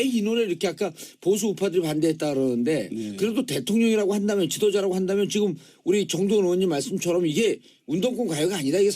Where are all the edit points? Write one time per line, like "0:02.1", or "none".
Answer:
0:07.5